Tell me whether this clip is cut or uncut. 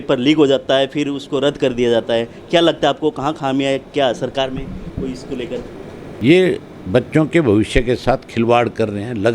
cut